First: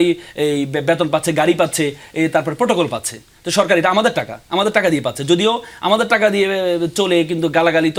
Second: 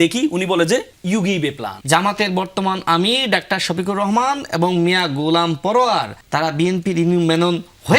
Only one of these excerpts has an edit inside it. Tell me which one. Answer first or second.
second